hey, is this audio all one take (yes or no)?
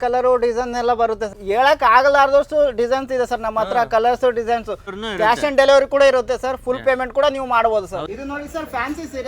no